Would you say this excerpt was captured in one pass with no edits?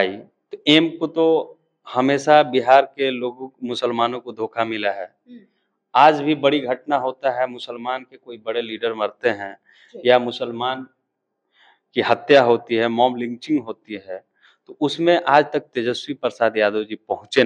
yes; 0 cuts

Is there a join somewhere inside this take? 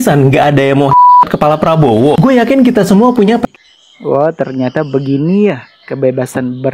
yes; 1 cut; at 3.4 s

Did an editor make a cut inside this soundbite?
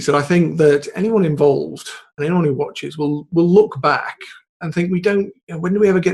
no; 0 cuts

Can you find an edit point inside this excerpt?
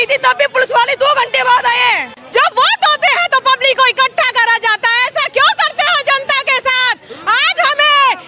yes; 1 cut; at 2.2 s

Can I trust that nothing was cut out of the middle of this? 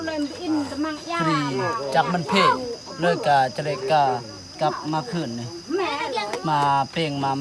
yes; 0 cuts

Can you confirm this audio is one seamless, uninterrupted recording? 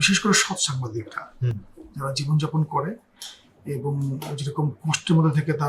yes; 0 cuts

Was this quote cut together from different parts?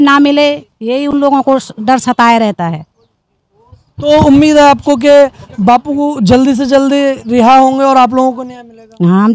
no; 0 cuts

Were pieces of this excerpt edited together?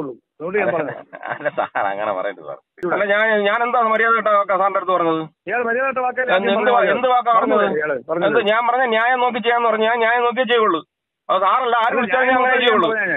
yes; 1 cut; at 2.8 s

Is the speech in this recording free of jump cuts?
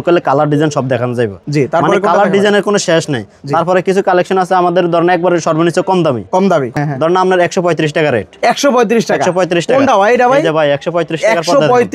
yes; 0 cuts

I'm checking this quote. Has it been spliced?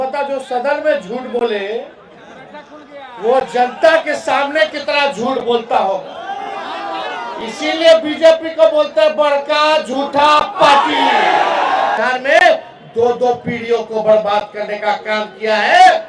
yes; 1 cut; at 12.0 s

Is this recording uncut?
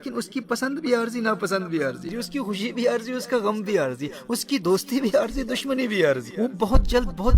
no; 2 cuts; at 2.1 s, 6.3 s

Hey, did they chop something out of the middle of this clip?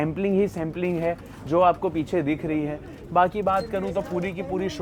no; 0 cuts

